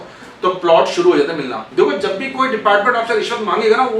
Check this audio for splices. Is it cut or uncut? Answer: cut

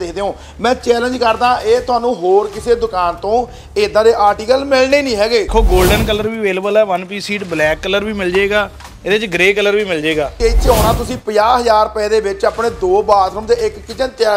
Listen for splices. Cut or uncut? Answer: cut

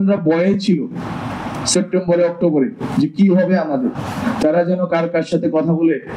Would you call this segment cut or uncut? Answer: uncut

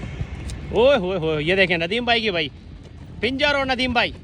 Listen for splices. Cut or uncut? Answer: uncut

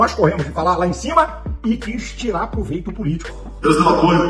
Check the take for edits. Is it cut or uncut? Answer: cut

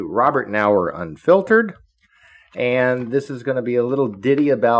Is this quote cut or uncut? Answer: uncut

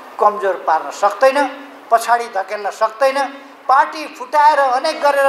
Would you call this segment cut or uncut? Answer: uncut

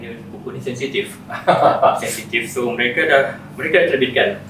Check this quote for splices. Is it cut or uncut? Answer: uncut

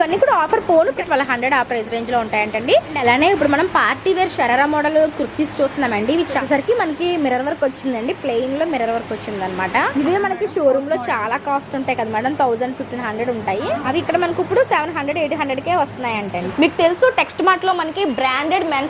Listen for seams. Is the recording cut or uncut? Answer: cut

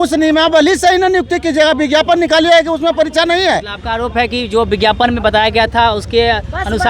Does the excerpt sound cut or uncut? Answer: uncut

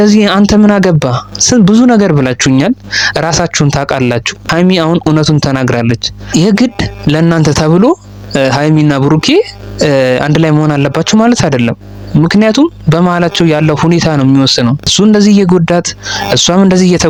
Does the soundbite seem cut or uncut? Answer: uncut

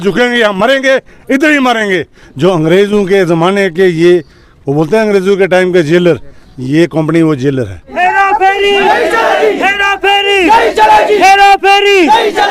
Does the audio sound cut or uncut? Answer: cut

